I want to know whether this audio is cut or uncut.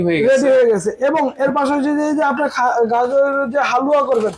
uncut